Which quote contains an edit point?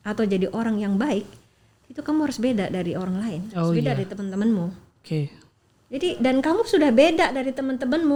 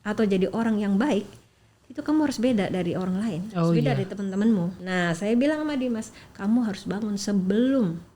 second; 1 cut; at 4.8 s

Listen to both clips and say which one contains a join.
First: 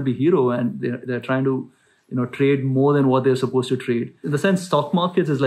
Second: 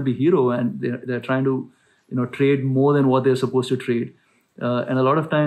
first; 1 cut; at 4.2 s

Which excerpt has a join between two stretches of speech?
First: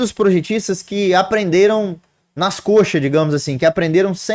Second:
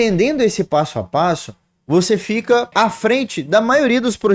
second; 1 cut; at 2.7 s

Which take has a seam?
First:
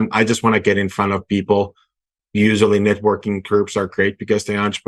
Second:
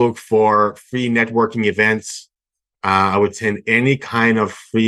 first; 1 cut; at 2.2 s

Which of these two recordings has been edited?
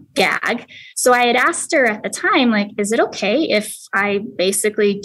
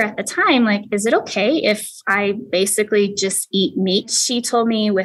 second; 1 cut; at 4.1 s

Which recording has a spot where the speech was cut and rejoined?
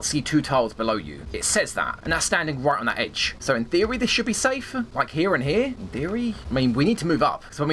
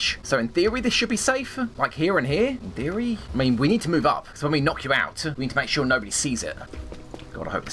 second; 1 cut; at 6.7 s

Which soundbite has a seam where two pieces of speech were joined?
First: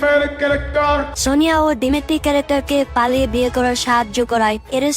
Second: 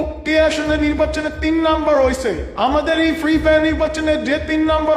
first; 1 cut; at 1.1 s

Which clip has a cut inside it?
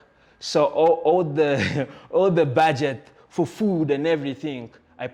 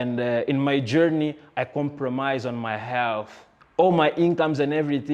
second; 1 cut; at 3.7 s

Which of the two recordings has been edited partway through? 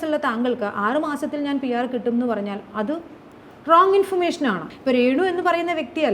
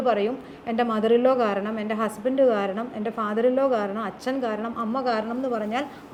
first; 1 cut; at 4.7 s

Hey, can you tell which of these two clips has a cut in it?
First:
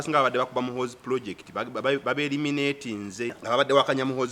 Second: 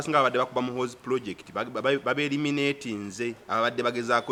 first; 1 cut; at 3.4 s

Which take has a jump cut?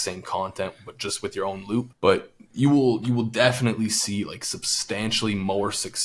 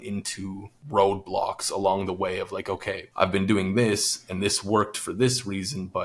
second; 1 cut; at 3.0 s

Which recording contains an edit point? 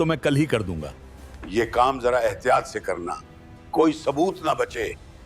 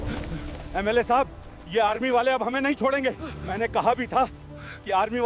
first; 1 cut; at 1.5 s

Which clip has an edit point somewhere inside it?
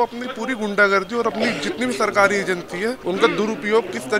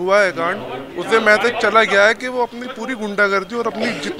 first; 1 cut; at 3.0 s

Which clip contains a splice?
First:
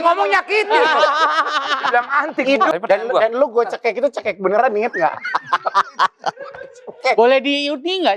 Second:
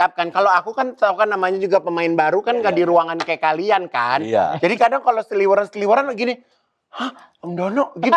first; 1 cut; at 2.7 s

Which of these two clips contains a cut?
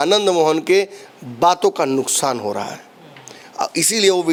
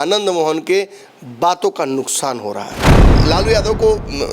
second; 1 cut; at 3.1 s

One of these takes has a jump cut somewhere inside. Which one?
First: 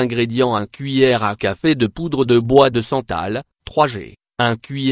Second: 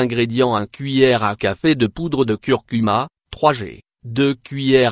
second; 2 cuts; at 2.1 s, 4.0 s

